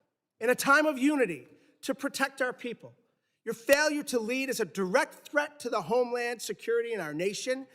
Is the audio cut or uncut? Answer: uncut